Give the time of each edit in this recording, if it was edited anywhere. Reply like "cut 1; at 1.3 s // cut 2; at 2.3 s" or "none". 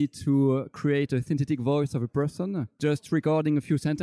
cut 1; at 2.7 s